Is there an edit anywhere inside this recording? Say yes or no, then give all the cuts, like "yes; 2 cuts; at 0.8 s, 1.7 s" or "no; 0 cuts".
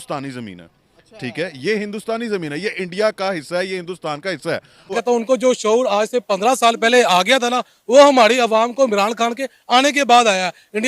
yes; 1 cut; at 5.0 s